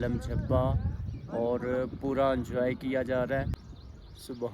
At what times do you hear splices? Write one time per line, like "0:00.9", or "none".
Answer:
0:03.5

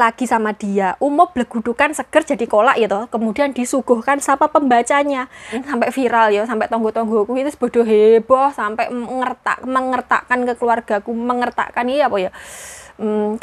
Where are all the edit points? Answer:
0:05.6

